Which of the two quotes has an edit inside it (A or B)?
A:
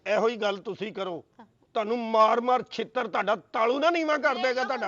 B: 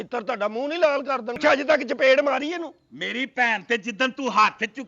B